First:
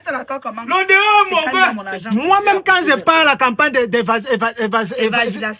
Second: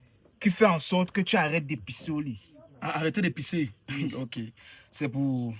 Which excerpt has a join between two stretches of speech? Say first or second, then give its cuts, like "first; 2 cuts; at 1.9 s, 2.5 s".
first; 1 cut; at 1.9 s